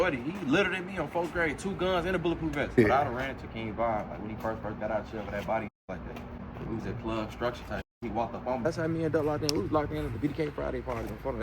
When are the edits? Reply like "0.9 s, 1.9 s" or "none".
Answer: 2.6 s, 8.6 s